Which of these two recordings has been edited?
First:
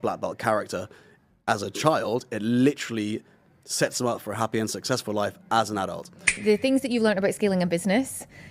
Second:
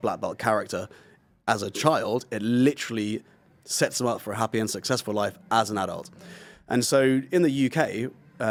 first; 1 cut; at 6.4 s

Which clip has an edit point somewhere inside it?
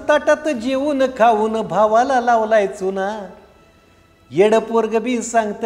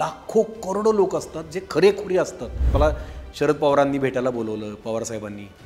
second; 1 cut; at 2.6 s

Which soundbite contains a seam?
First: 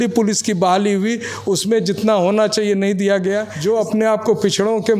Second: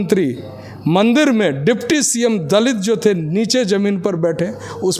first; 1 cut; at 3.5 s

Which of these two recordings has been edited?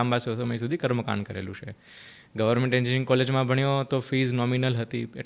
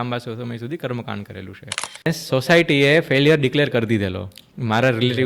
second; 1 cut; at 2.1 s

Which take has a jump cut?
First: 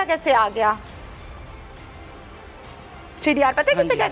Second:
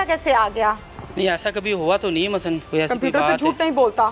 second; 2 cuts; at 0.9 s, 2.6 s

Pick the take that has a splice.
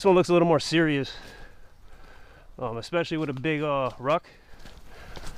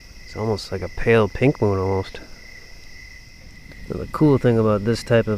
second; 1 cut; at 3.7 s

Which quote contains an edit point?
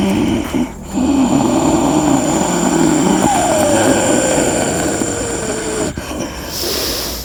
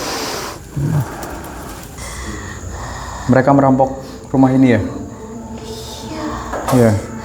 second; 1 cut; at 1.9 s

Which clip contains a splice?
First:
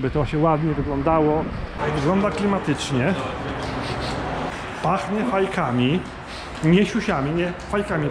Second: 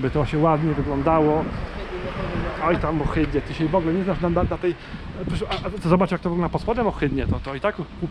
first; 2 cuts; at 1.7 s, 4.5 s

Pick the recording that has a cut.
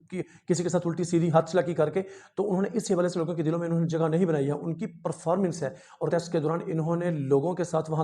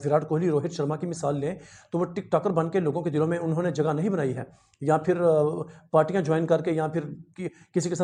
first; 1 cut; at 6.1 s

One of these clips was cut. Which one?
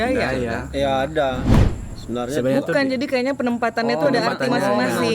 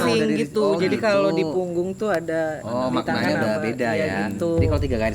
first; 1 cut; at 1.6 s

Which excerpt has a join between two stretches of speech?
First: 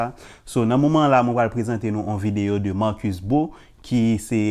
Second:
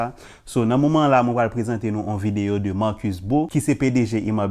second; 1 cut; at 3.5 s

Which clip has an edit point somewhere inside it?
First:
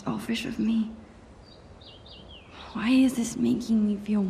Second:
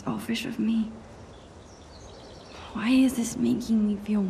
second; 2 cuts; at 1.2 s, 2.6 s

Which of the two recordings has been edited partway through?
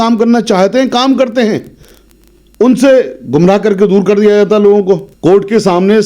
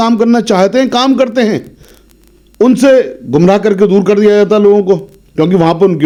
first; 1 cut; at 5.1 s

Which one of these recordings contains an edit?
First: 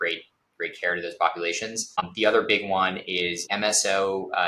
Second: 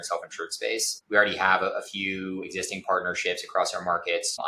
first; 2 cuts; at 1.9 s, 3.5 s

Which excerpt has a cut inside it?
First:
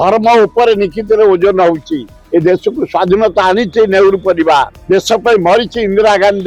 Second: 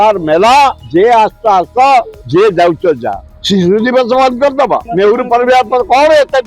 second; 4 cuts; at 0.8 s, 2.2 s, 3.3 s, 4.9 s

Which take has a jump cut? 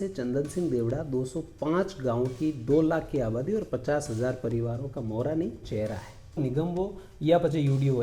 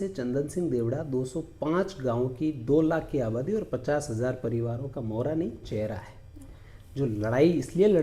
first; 1 cut; at 6.4 s

